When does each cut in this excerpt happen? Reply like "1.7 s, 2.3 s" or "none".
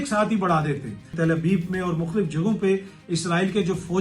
1.1 s